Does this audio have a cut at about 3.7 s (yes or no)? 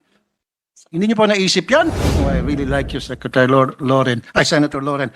no